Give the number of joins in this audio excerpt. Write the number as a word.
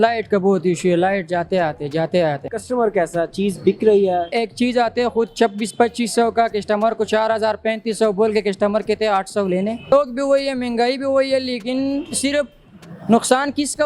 three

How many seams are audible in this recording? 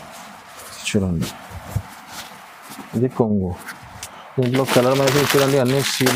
zero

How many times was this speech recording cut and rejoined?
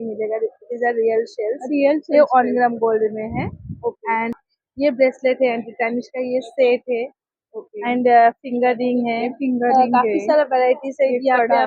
zero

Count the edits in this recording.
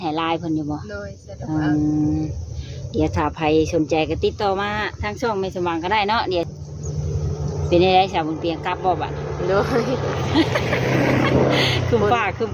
one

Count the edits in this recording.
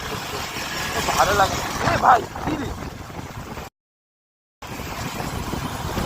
one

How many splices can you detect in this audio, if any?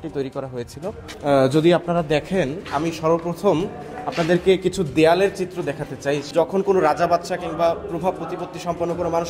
two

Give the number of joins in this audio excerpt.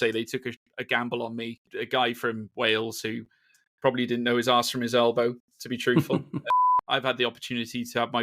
two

